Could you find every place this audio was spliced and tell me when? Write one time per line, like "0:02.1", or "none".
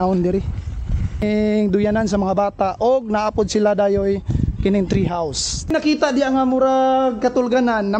0:01.2
0:05.7